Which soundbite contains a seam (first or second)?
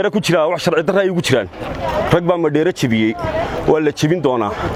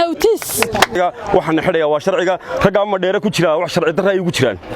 second